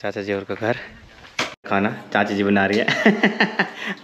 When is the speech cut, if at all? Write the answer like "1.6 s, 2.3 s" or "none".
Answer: 1.7 s

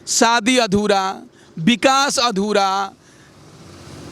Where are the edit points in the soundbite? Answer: none

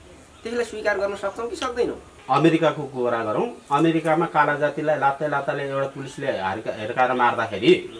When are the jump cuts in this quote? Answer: 2.1 s

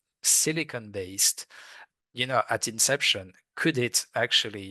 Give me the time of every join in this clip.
none

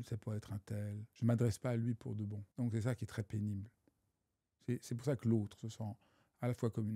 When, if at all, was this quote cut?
1.0 s, 2.4 s

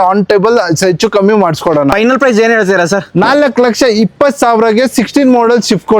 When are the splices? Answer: 1.9 s

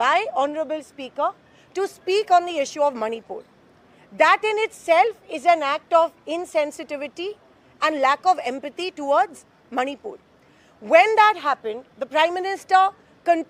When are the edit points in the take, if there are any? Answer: none

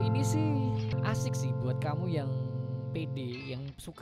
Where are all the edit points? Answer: 0.9 s

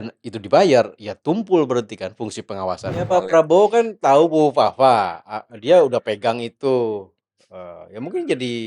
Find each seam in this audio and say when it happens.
3.1 s

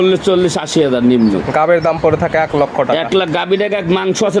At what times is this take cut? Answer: none

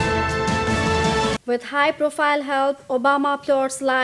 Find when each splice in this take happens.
1.0 s

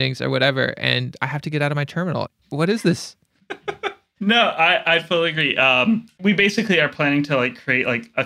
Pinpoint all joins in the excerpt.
2.4 s, 4.1 s, 6.1 s

